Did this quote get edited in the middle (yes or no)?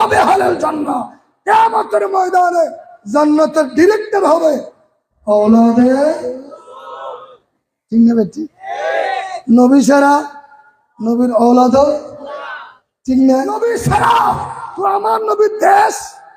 yes